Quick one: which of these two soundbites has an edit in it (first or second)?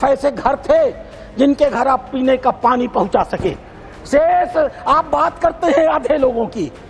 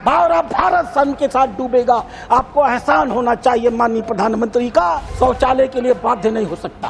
second